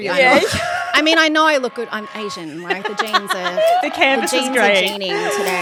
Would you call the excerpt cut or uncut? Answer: uncut